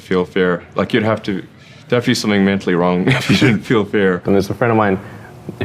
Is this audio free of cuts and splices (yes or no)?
no